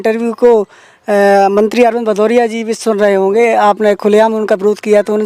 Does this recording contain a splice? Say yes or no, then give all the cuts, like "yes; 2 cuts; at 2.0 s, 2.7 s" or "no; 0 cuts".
no; 0 cuts